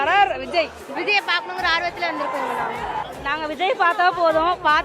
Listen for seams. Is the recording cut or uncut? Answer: cut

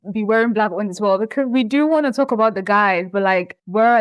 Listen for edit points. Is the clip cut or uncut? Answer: uncut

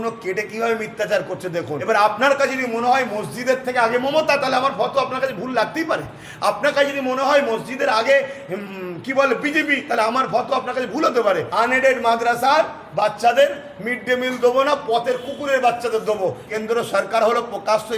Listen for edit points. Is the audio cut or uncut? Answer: cut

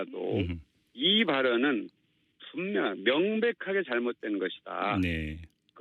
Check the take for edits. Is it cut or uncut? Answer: uncut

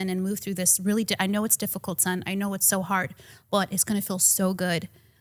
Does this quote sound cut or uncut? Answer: uncut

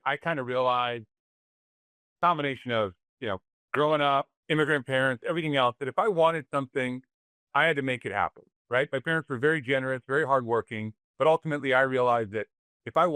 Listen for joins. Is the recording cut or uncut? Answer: cut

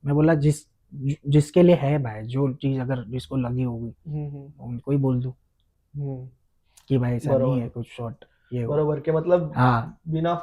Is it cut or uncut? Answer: uncut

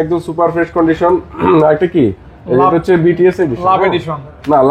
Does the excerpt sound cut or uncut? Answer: uncut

